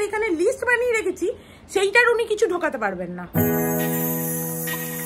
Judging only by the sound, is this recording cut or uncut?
uncut